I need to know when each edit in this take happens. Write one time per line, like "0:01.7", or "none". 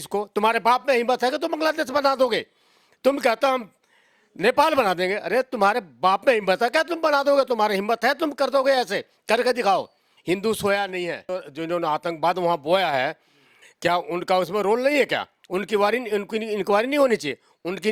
0:11.4